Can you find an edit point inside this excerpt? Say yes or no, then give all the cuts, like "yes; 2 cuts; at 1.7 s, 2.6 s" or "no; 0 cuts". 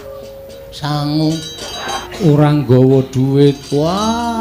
yes; 1 cut; at 2.0 s